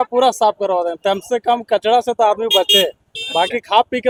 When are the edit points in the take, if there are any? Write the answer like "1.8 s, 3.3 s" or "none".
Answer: none